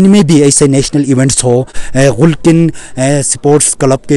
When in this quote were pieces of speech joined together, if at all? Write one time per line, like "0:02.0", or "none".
0:01.8